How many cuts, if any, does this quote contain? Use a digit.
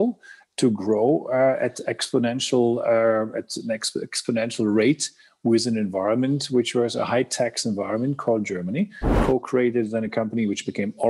1